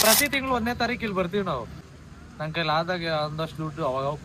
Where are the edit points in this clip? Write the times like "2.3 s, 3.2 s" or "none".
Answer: 1.9 s